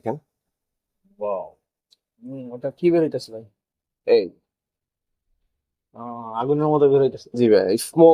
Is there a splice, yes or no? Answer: no